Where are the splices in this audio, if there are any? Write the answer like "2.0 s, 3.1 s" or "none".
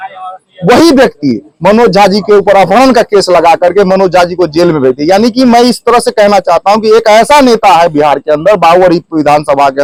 none